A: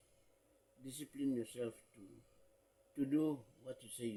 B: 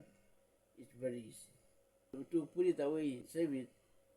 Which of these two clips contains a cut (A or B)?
B